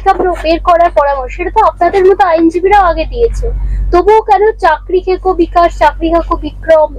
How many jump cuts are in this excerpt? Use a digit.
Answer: 0